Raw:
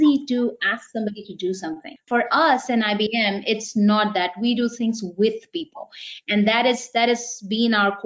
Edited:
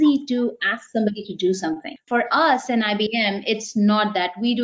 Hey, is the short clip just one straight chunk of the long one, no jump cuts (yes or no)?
yes